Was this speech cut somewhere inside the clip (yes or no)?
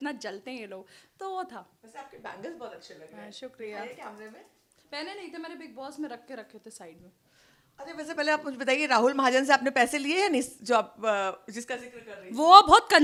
no